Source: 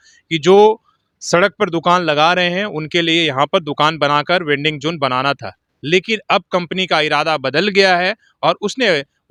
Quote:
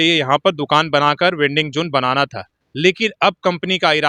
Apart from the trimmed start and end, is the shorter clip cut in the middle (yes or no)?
no